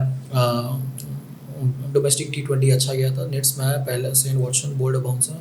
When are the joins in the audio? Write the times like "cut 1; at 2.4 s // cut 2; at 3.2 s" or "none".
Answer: none